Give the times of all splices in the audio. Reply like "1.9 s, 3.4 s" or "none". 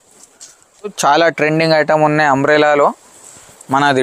1.0 s